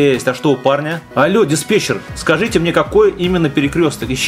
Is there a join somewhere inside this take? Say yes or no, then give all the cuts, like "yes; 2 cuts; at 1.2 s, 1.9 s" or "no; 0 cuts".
yes; 1 cut; at 1.0 s